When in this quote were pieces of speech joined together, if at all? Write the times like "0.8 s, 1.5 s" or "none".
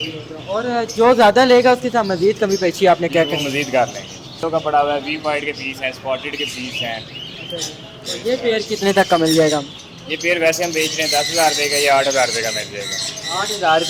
none

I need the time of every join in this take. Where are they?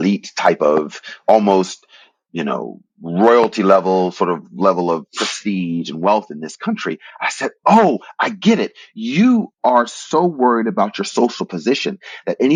none

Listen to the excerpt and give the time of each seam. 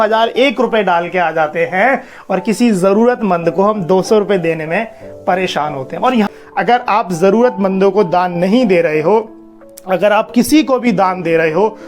6.3 s

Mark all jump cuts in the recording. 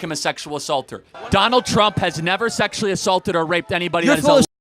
1.1 s

